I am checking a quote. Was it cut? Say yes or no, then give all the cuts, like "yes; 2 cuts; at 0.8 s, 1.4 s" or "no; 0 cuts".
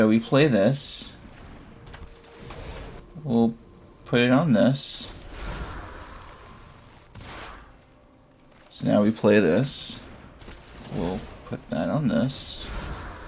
yes; 1 cut; at 3.0 s